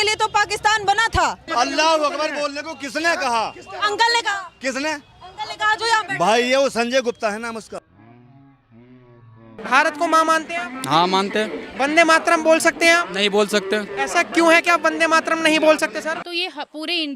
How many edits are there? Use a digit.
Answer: 3